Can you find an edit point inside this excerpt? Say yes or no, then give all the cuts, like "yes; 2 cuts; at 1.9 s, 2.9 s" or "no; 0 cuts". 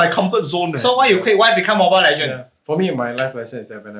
yes; 1 cut; at 2.5 s